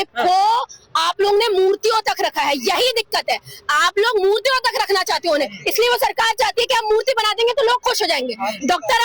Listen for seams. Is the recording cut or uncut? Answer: uncut